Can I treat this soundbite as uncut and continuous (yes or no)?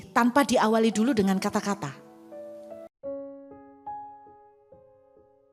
yes